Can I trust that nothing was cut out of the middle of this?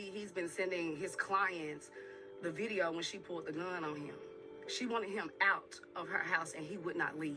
yes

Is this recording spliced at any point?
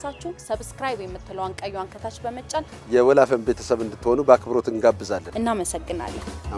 yes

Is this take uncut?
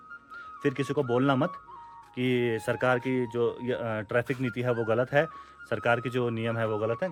yes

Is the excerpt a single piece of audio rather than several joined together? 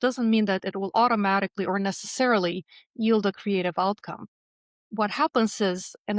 yes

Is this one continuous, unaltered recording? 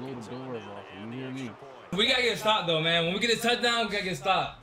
no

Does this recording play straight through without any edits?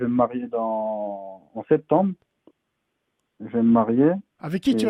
yes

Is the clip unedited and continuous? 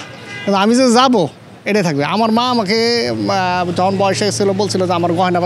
yes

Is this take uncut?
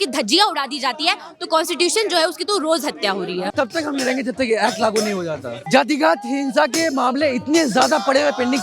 no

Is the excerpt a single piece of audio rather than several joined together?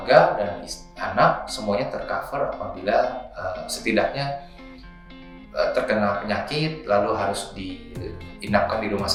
yes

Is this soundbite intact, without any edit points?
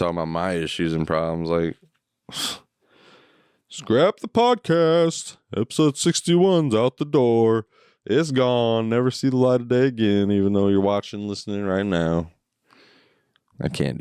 yes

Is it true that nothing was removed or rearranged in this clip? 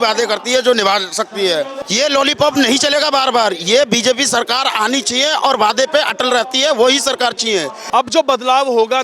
no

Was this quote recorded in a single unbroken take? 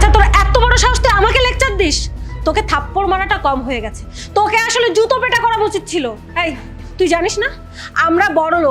yes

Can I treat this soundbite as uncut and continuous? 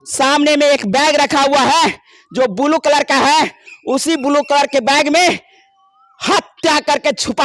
yes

